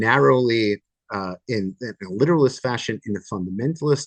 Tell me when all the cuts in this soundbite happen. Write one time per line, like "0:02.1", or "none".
none

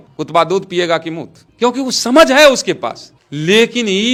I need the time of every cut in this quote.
none

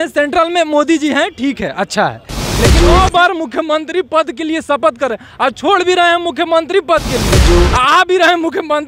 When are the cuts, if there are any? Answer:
0:02.8

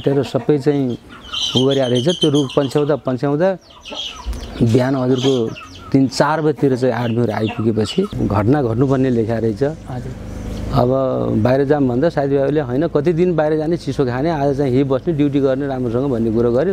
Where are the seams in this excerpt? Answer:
0:08.1

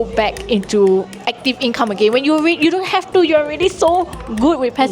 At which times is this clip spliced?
none

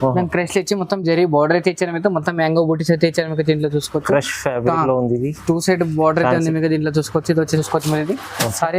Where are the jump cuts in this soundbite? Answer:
0:07.5

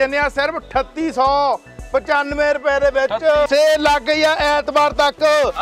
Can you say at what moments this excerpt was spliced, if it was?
0:03.5

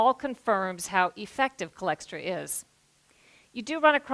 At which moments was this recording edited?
0:01.8

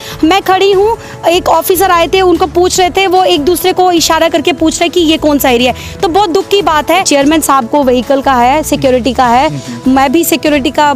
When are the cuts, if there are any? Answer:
0:07.1

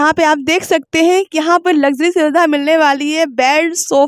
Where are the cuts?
none

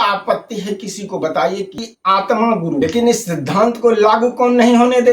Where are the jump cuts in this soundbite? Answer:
0:01.7
0:02.8

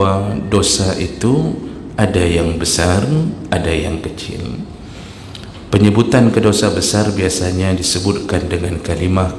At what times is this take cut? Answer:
none

